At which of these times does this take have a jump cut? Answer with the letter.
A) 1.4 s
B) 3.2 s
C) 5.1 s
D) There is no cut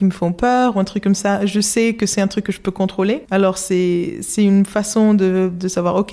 B